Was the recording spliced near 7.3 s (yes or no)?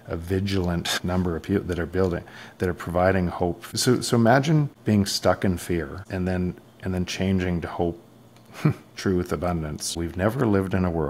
no